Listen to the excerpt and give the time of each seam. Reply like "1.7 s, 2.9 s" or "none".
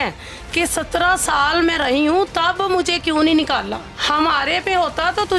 3.9 s